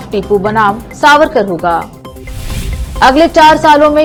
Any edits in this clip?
no; 0 cuts

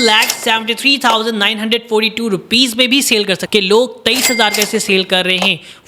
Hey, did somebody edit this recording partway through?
yes; 1 cut; at 3.4 s

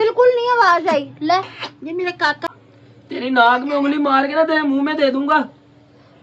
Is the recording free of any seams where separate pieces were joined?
no; 1 cut; at 2.4 s

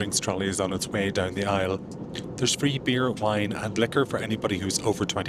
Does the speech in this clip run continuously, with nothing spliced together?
yes; 0 cuts

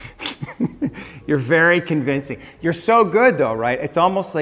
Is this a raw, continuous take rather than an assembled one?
yes; 0 cuts

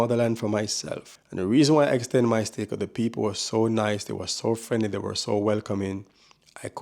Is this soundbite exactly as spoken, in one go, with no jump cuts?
no; 1 cut; at 1.2 s

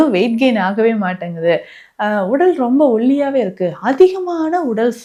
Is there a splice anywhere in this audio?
no; 0 cuts

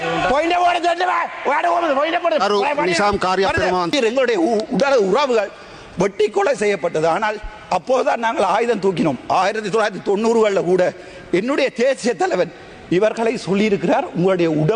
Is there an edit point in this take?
yes; 1 cut; at 3.9 s

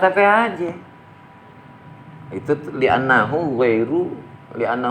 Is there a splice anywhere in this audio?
no; 0 cuts

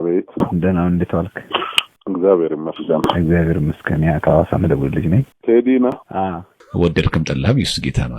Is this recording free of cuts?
no; 2 cuts; at 5.3 s, 6.7 s

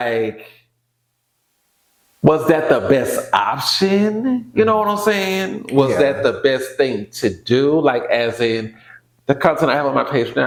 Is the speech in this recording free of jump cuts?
yes; 0 cuts

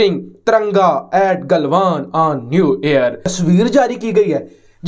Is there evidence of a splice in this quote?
yes; 1 cut; at 3.2 s

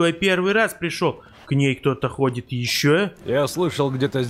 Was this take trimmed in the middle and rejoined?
yes; 1 cut; at 3.2 s

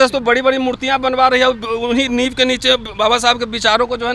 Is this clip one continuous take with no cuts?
yes; 0 cuts

